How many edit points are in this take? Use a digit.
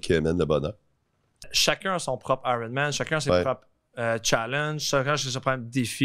1